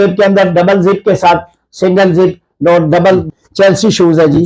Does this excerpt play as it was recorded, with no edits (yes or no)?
no